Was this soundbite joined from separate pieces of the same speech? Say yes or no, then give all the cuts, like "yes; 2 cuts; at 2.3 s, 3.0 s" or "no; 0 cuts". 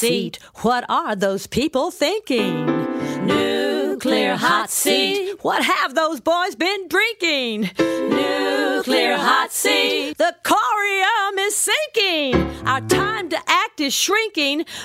no; 0 cuts